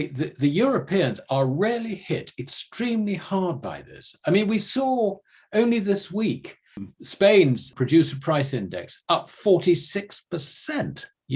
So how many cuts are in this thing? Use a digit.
2